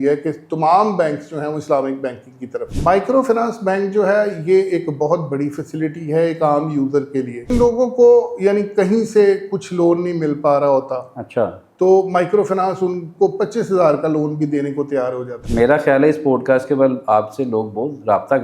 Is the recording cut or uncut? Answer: cut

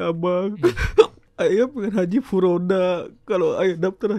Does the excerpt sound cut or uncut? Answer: cut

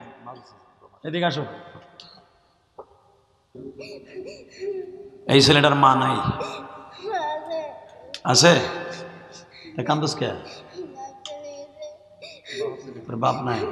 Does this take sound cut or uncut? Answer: cut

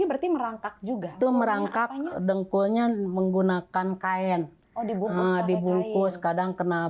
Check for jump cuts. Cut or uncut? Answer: cut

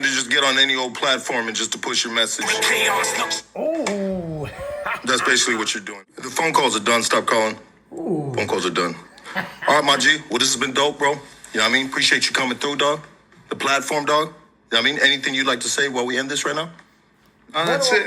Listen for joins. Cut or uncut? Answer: cut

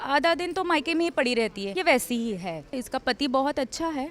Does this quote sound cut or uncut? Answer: cut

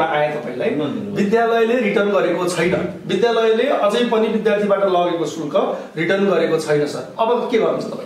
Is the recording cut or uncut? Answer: uncut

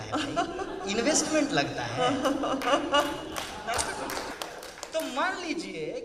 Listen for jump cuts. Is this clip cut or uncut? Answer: cut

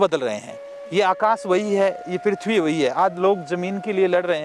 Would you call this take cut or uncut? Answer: uncut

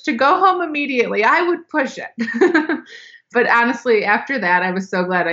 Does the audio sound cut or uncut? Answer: cut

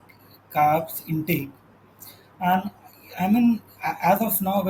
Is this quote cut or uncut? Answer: uncut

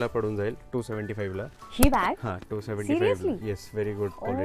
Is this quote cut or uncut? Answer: uncut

